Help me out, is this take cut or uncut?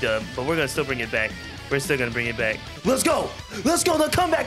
cut